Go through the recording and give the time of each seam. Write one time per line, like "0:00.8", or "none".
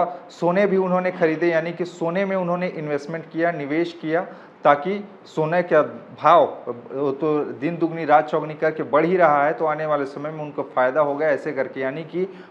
none